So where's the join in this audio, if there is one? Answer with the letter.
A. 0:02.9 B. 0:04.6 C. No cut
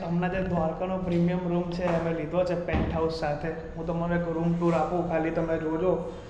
C